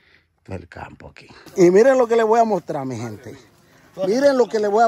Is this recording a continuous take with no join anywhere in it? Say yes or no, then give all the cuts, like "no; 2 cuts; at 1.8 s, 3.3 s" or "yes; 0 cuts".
no; 1 cut; at 1.4 s